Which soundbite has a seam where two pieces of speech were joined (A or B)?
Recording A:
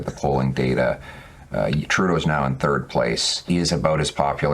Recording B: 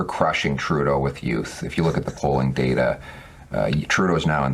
A